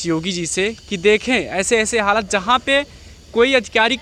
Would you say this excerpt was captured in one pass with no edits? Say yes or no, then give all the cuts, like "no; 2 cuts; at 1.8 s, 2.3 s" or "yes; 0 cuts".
yes; 0 cuts